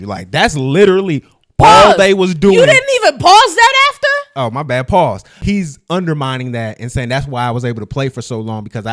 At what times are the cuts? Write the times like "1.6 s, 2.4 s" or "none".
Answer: 5.3 s